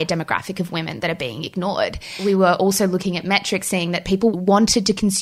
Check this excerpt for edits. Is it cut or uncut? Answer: cut